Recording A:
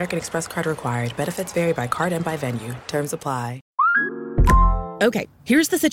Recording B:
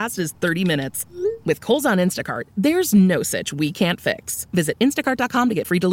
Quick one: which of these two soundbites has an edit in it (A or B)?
A